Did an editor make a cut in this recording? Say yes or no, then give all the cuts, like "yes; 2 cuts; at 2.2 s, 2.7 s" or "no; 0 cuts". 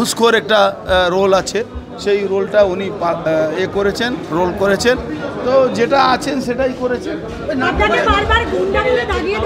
no; 0 cuts